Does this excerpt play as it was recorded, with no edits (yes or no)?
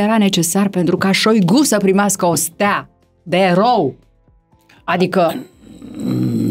yes